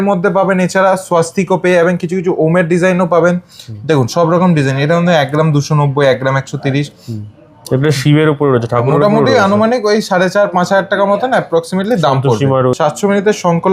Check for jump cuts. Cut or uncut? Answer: cut